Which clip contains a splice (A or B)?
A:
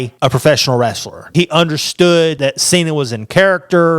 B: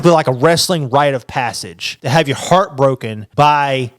A